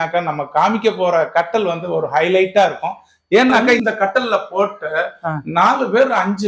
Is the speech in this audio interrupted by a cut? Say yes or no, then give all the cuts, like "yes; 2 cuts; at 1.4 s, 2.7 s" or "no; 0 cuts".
yes; 1 cut; at 3.8 s